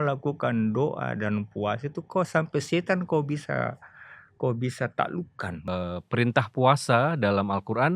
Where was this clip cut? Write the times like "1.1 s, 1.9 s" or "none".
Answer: 5.7 s